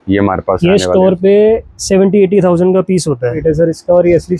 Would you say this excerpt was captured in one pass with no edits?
no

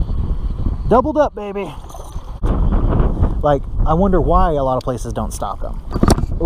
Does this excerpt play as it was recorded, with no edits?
no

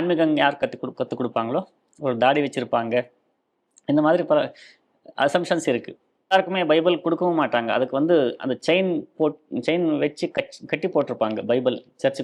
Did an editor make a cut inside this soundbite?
yes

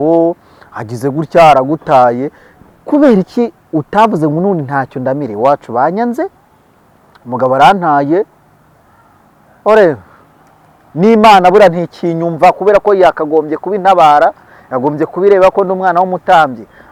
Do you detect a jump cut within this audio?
no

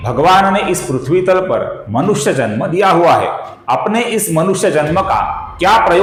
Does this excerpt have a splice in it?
no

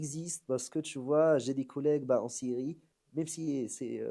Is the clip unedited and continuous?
yes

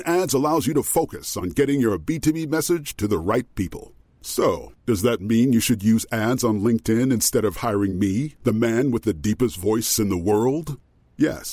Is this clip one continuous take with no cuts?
yes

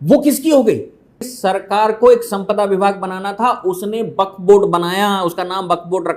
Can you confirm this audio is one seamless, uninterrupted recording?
no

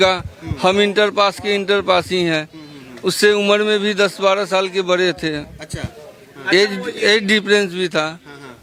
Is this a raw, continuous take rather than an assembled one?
yes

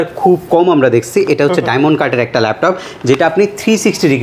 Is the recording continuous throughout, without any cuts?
yes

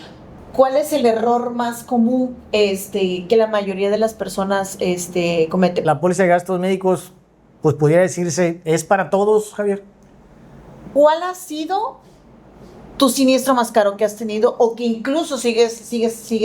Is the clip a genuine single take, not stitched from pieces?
no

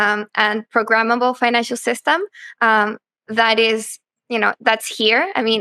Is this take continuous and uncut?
yes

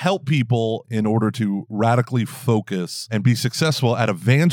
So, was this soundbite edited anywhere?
yes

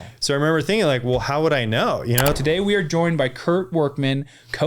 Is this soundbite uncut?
no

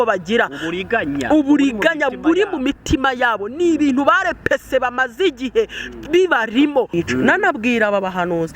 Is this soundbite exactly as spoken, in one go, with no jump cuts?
no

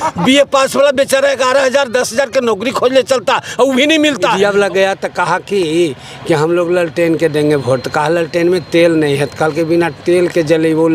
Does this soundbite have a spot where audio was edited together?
yes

